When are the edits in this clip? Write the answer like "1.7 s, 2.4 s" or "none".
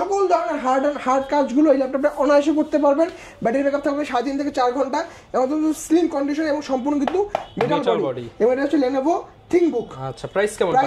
none